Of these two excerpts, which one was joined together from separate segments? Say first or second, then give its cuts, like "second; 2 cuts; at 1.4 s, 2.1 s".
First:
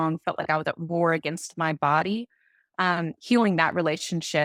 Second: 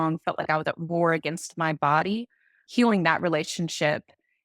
second; 1 cut; at 2.6 s